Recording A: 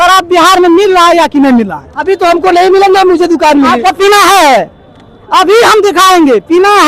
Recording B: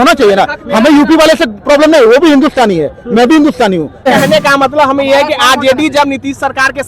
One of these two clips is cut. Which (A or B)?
B